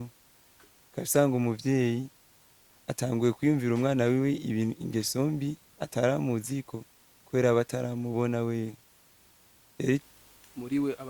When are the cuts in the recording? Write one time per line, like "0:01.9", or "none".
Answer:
0:10.0